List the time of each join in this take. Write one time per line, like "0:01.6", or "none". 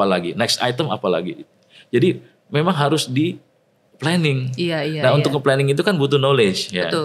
none